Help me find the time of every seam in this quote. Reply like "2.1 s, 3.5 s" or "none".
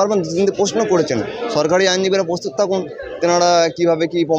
none